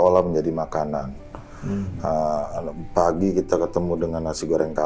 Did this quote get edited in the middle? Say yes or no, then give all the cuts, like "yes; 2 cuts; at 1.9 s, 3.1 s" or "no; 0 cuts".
no; 0 cuts